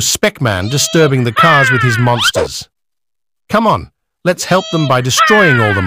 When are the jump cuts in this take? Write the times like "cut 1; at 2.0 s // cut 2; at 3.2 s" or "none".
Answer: none